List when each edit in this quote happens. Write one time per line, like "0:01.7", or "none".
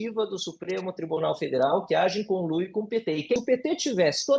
0:03.4

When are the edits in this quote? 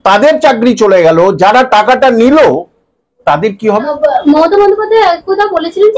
0:03.9

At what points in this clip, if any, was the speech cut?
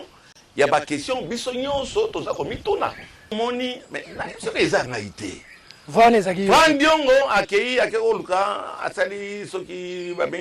0:03.4

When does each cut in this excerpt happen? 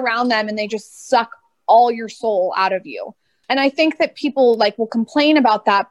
none

